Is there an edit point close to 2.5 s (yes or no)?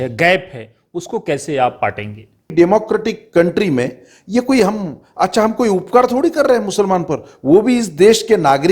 yes